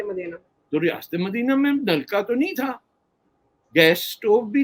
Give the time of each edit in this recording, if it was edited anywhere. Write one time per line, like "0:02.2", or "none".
none

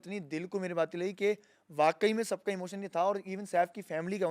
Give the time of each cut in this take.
none

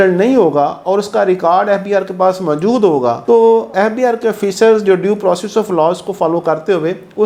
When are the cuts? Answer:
none

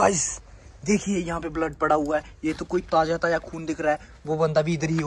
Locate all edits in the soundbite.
none

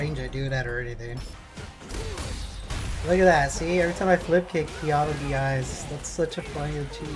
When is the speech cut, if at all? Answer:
0:01.4

